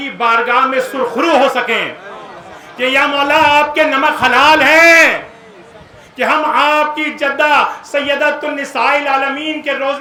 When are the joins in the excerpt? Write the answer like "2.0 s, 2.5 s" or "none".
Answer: none